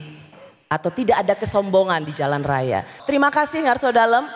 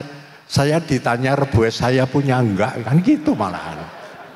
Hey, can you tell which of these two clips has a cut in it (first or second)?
first